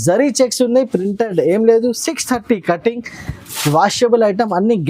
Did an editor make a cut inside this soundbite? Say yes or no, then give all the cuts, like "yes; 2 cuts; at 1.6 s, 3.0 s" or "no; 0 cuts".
no; 0 cuts